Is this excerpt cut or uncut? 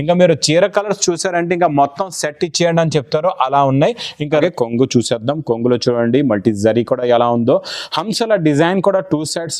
cut